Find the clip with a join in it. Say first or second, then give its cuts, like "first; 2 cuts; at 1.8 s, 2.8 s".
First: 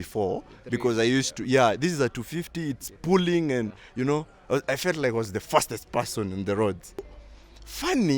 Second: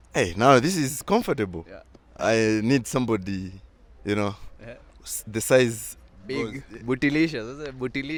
first; 1 cut; at 7.0 s